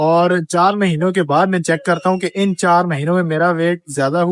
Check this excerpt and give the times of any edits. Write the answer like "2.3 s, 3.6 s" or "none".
none